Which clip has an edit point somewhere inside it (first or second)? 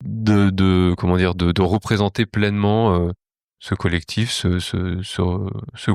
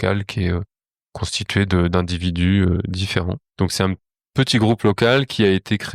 second